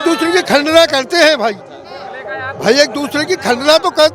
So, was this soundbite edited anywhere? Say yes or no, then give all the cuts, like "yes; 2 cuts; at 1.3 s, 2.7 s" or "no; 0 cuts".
no; 0 cuts